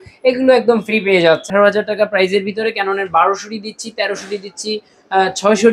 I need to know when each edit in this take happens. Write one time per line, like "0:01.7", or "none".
0:01.5